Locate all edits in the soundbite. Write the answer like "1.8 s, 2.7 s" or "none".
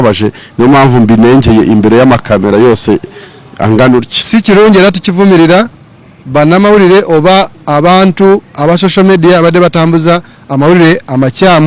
none